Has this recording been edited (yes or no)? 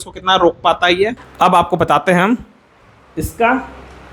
yes